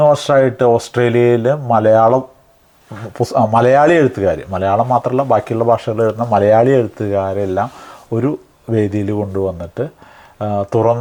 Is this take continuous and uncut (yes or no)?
yes